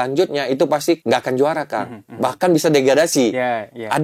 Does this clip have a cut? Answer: yes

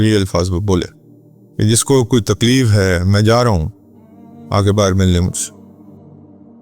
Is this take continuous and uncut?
no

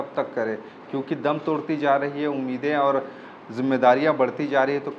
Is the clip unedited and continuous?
yes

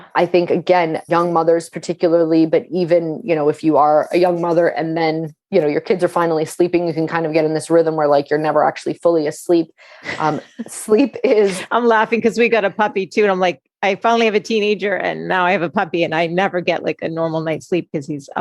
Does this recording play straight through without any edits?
no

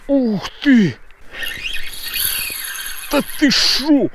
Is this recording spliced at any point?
yes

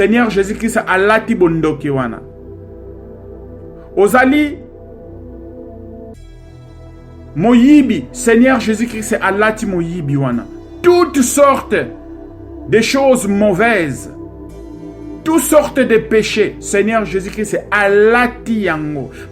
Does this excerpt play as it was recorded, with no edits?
yes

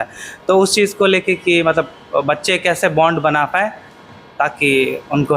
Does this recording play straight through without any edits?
yes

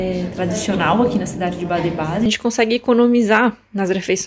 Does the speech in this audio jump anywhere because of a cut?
yes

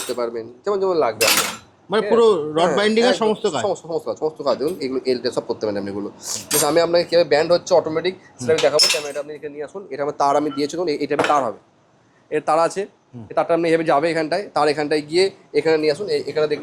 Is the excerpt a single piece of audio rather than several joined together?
yes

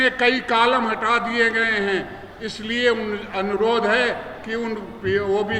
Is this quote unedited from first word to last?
yes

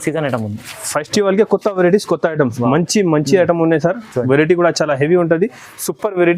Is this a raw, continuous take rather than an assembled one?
yes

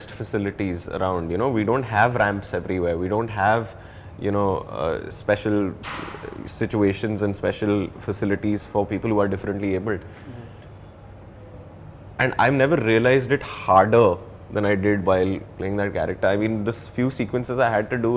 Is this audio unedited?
yes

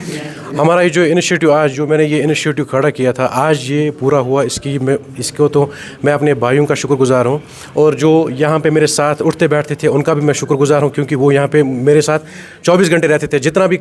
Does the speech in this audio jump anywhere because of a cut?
no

